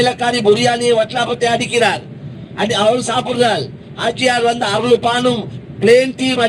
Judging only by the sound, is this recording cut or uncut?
uncut